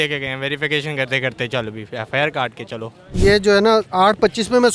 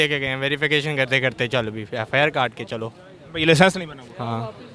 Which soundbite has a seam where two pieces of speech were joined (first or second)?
first